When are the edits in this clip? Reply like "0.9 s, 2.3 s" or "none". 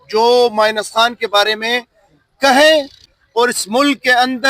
3.0 s